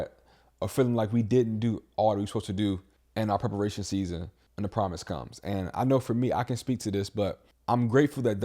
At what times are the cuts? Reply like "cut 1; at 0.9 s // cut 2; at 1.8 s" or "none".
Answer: cut 1; at 3.0 s // cut 2; at 4.4 s // cut 3; at 7.5 s